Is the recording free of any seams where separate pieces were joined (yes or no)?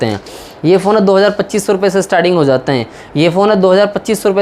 yes